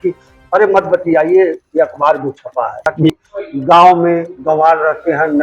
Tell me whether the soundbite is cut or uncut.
cut